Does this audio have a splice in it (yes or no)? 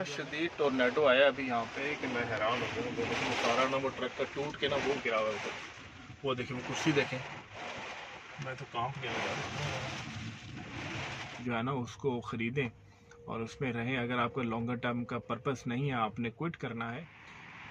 yes